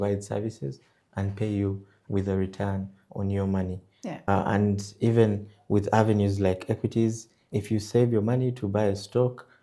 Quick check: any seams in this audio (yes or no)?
no